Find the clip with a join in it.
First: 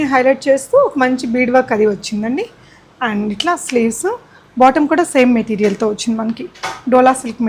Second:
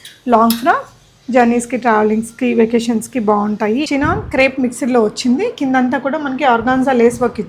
second; 1 cut; at 3.8 s

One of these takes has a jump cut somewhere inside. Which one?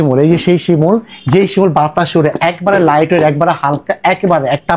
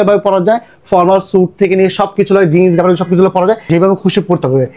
second; 1 cut; at 3.7 s

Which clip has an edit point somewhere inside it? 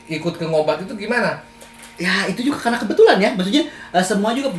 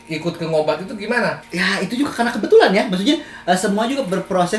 second; 1 cut; at 1.4 s

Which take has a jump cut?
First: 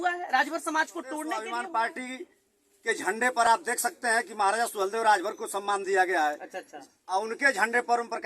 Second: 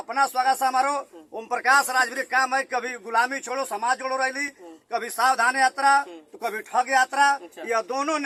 first; 1 cut; at 1.4 s

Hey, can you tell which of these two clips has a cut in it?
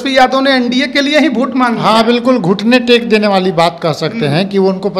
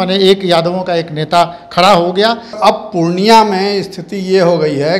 second; 1 cut; at 2.6 s

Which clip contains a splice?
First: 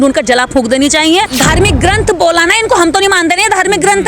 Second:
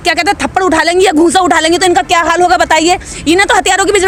first; 1 cut; at 1.3 s

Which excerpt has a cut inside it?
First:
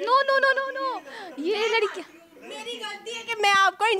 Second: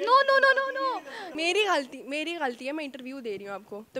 second; 1 cut; at 1.2 s

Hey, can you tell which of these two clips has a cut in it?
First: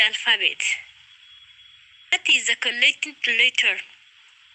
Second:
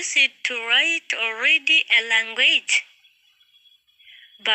first; 1 cut; at 2.1 s

